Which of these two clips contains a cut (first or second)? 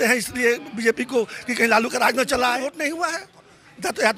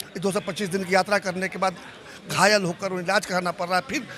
first